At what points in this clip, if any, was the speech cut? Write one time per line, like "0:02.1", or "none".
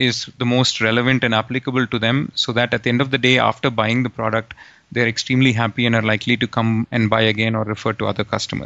none